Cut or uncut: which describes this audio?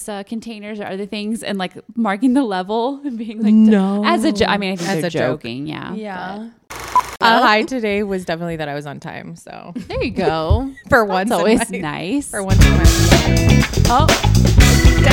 cut